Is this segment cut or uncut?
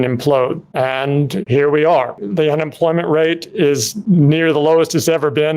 cut